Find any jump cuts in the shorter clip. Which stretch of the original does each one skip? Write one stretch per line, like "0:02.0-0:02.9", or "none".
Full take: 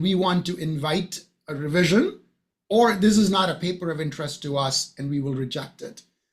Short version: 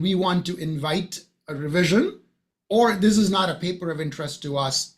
none

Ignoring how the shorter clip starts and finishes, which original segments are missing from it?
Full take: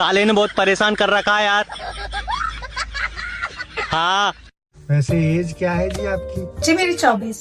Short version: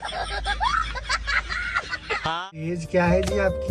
0:04.5-0:05.5

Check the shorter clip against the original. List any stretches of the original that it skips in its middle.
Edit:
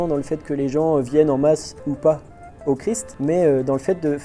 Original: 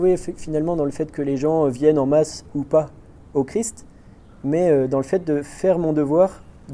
0:03.8-0:04.3

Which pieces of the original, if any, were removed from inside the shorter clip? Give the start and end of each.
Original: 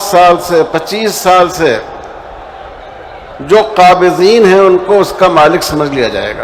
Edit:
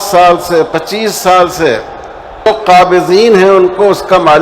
0:02.5-0:03.6

